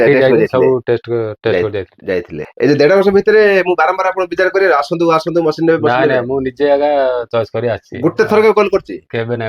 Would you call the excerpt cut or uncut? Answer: cut